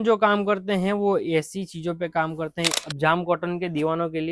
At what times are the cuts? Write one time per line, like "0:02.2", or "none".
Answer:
0:02.7